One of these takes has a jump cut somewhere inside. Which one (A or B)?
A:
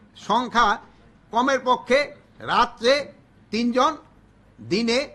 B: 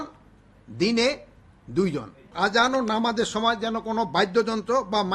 B